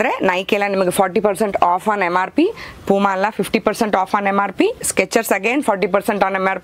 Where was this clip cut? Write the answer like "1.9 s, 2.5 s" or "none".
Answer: none